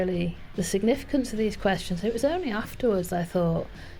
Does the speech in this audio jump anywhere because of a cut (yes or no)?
no